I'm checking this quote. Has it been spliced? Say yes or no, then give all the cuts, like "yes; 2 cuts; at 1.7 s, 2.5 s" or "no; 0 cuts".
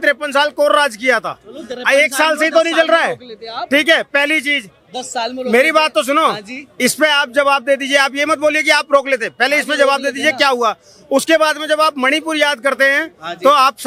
no; 0 cuts